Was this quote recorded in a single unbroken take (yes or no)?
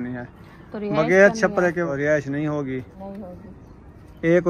no